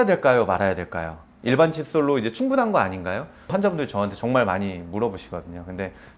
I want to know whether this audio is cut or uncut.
uncut